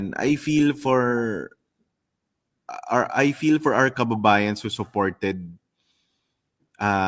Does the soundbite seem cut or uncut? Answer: uncut